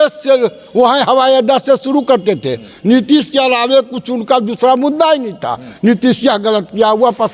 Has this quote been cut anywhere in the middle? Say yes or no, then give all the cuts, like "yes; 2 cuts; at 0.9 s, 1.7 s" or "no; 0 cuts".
no; 0 cuts